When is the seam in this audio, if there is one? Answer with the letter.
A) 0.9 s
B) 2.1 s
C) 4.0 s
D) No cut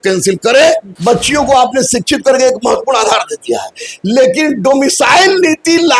A